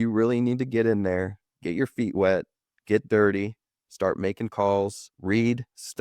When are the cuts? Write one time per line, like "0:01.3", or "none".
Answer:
0:05.1